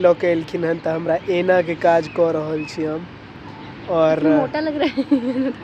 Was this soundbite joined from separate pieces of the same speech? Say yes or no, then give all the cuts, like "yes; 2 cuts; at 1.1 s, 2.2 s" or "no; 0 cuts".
no; 0 cuts